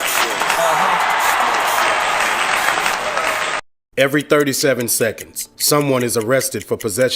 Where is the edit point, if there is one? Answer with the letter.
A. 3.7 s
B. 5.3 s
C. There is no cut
A